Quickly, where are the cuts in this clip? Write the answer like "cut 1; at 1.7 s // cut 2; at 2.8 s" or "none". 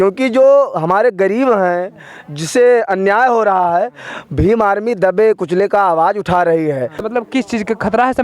cut 1; at 7.0 s